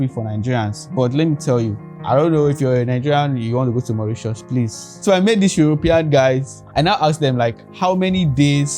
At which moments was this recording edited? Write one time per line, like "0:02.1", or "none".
0:01.9
0:04.9
0:06.6
0:07.7